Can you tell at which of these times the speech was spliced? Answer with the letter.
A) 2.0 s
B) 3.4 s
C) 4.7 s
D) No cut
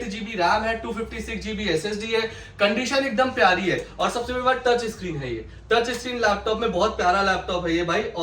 D